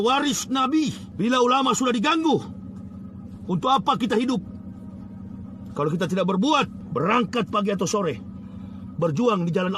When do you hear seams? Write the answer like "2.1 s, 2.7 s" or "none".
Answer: 1.0 s, 6.8 s